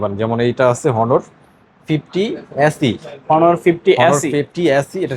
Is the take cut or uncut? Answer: uncut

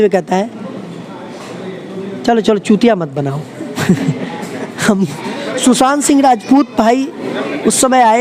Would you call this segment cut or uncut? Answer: cut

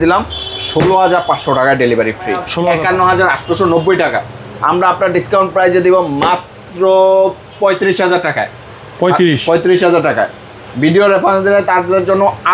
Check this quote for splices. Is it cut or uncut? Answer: cut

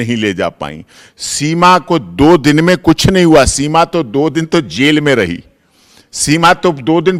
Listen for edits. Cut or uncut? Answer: uncut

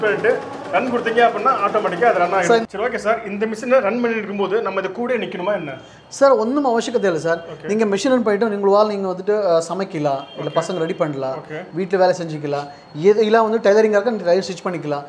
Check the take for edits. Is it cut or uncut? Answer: uncut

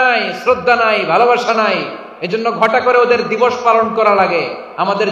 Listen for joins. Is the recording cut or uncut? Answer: uncut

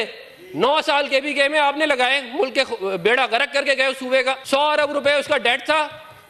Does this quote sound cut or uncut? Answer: cut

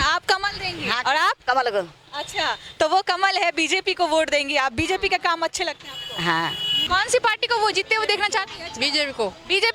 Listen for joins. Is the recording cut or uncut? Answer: cut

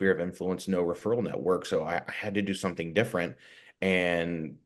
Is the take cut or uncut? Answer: uncut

